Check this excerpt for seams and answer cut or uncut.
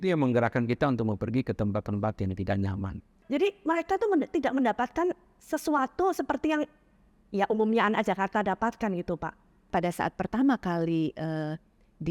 cut